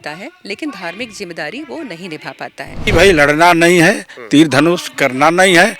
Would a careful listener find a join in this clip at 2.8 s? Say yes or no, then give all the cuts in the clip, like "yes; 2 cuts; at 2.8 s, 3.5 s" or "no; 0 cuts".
yes; 1 cut; at 2.8 s